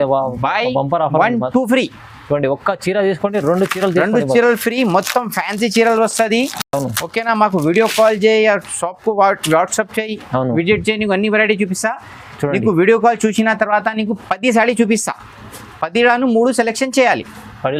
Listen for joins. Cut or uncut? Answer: uncut